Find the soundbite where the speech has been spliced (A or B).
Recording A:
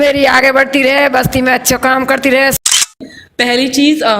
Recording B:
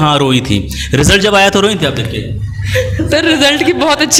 A